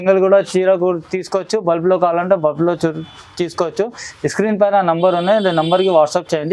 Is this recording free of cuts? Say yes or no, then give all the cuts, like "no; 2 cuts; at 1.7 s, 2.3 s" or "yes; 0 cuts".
yes; 0 cuts